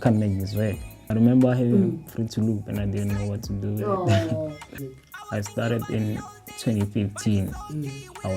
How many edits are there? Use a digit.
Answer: 2